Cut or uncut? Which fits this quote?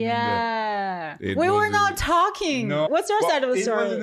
cut